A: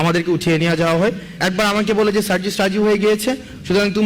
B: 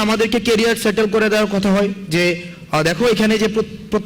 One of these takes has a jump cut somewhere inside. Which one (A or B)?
A